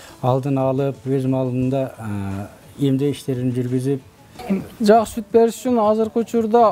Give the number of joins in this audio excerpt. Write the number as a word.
one